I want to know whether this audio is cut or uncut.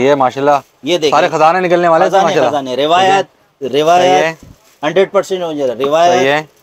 uncut